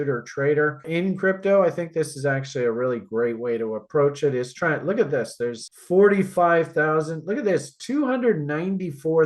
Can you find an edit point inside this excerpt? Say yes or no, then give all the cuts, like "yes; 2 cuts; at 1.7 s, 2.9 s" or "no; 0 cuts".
yes; 2 cuts; at 0.8 s, 5.6 s